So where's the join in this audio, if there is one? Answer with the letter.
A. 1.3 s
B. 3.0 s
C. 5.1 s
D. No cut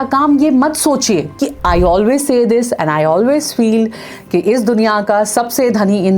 A